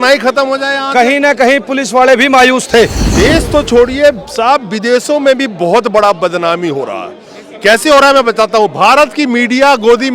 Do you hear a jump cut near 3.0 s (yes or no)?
yes